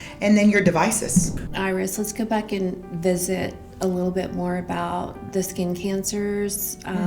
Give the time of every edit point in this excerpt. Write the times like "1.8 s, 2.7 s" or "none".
1.4 s